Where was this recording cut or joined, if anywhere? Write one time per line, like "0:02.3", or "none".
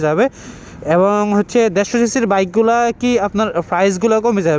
none